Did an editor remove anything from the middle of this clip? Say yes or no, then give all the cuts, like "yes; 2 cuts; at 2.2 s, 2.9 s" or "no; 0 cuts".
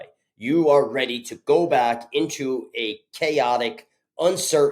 no; 0 cuts